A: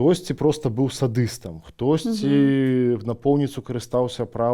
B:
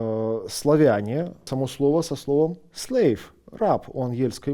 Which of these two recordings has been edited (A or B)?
B